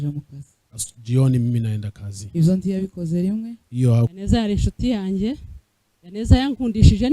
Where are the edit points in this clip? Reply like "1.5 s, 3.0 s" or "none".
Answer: 4.2 s